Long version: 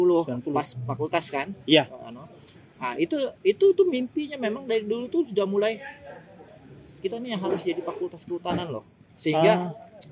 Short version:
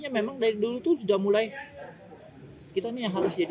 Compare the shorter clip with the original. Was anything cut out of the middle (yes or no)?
no